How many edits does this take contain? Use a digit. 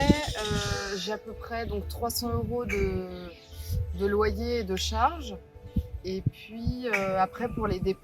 0